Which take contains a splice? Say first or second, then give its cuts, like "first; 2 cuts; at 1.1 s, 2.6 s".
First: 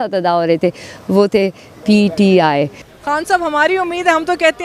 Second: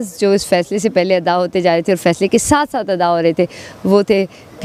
first; 1 cut; at 2.8 s